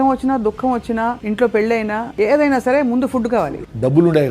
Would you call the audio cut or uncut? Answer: cut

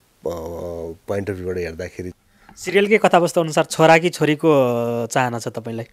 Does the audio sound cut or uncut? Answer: cut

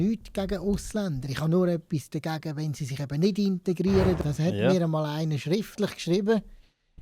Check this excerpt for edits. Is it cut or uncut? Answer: cut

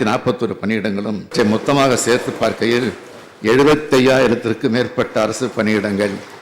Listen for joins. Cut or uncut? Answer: cut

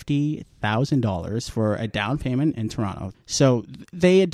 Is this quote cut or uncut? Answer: cut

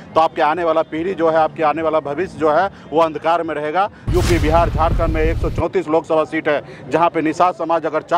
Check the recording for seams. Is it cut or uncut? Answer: cut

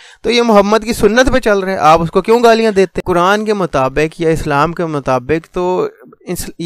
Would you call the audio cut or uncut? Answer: cut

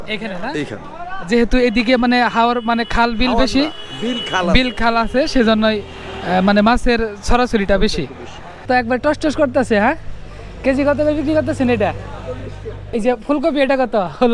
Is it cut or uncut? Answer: cut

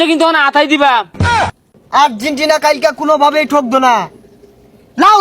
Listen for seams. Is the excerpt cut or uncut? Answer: cut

